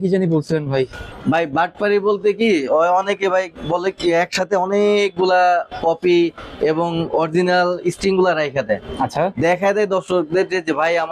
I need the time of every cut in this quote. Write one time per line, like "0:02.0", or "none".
0:01.0

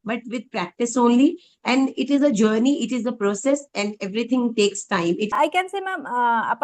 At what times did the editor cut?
0:05.3

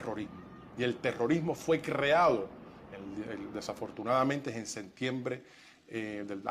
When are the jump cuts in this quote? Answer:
none

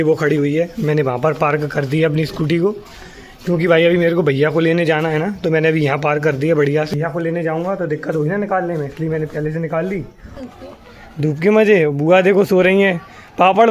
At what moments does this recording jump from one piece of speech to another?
0:06.9
0:10.4

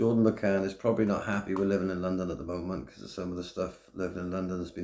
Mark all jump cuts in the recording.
none

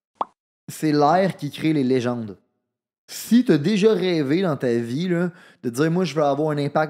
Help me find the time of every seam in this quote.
none

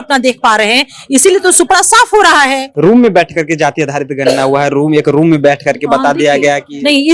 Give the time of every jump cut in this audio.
0:02.6

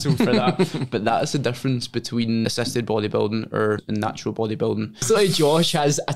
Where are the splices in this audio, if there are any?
0:02.4
0:03.8
0:05.0

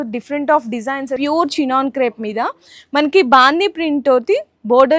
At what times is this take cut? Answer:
0:01.2

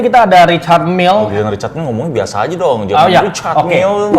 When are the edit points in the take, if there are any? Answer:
0:01.3

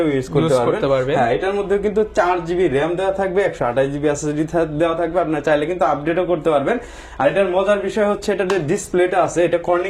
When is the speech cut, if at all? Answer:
none

